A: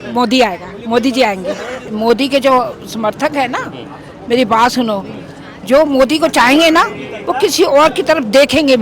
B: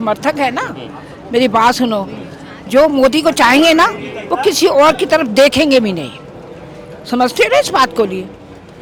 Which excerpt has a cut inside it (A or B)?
A